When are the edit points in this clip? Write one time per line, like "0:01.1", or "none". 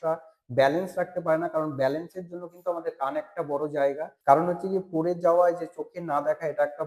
0:04.1